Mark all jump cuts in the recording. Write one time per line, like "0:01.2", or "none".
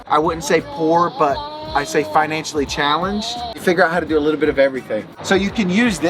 none